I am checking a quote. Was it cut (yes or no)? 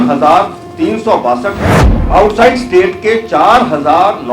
yes